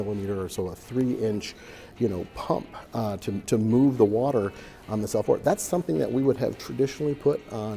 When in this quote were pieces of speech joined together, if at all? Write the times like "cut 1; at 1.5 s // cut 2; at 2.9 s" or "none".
none